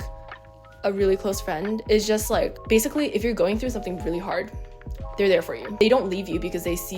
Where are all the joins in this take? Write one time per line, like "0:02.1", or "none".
0:05.6